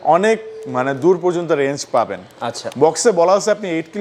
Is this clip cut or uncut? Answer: uncut